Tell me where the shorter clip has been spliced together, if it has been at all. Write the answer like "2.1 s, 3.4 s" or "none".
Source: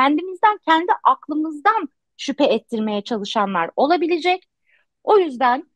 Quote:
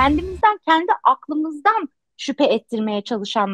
none